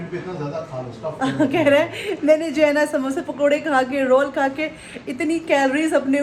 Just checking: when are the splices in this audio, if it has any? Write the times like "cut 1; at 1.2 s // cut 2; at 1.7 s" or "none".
none